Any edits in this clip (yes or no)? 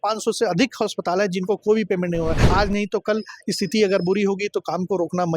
yes